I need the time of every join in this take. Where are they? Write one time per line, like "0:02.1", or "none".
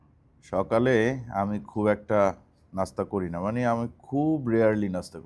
none